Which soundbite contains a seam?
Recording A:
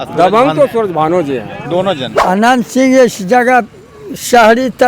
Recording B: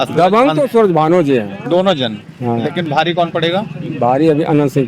A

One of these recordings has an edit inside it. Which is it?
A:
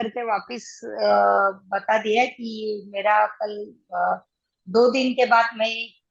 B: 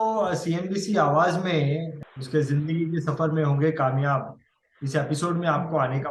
B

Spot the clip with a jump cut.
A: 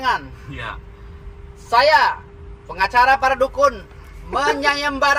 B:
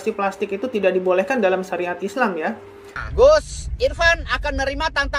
B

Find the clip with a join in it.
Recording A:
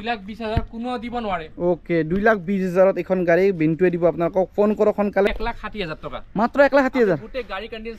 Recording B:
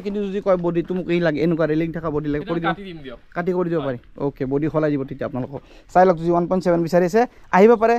A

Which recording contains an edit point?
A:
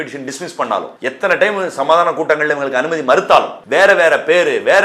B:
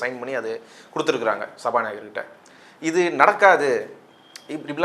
A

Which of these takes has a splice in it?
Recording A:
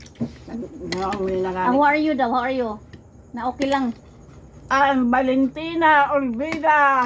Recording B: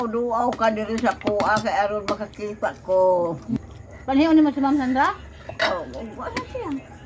B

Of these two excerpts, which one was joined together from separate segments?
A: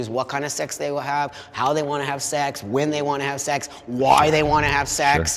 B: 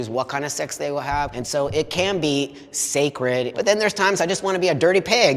B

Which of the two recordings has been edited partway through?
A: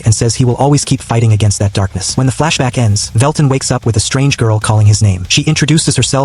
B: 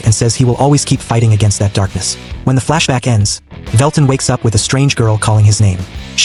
A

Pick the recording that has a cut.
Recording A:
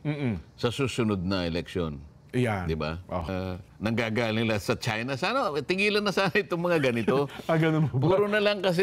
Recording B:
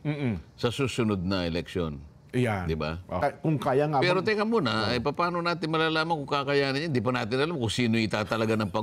B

